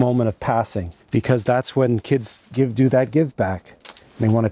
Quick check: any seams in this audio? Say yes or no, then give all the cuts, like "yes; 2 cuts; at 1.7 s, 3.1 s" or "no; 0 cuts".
yes; 1 cut; at 1.0 s